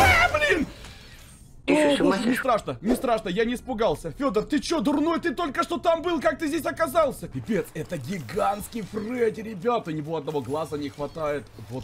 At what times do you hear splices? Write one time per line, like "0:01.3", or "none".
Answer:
0:07.3